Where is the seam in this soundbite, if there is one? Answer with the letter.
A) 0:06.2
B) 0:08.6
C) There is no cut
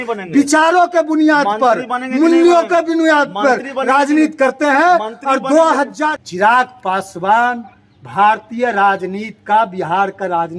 A